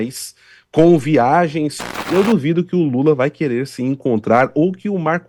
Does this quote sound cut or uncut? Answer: cut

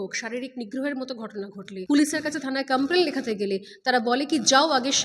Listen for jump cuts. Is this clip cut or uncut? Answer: cut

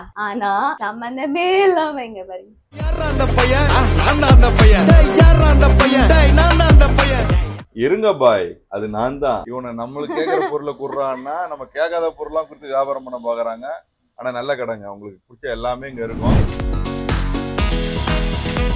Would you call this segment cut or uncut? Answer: uncut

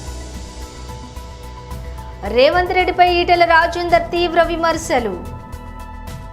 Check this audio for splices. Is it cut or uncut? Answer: cut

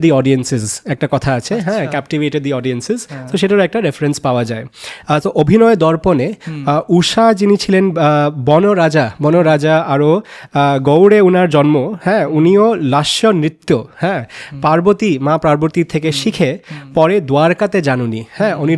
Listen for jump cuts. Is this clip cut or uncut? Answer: cut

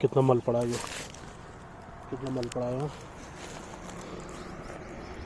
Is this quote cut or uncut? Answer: uncut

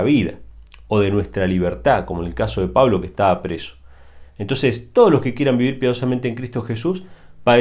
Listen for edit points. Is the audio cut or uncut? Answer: uncut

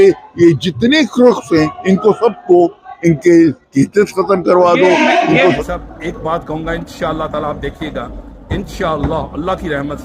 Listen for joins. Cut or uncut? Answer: cut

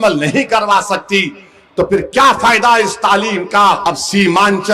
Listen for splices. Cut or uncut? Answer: cut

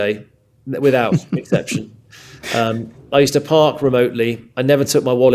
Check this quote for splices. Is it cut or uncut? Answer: uncut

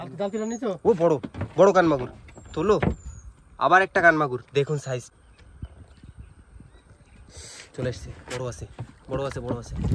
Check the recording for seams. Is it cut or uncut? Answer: cut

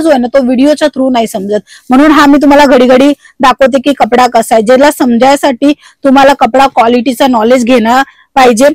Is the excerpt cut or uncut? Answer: uncut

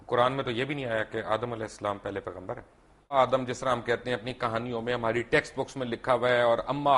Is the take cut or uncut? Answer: cut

